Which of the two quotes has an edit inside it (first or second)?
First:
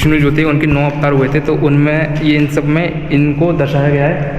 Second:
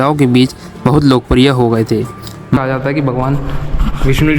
second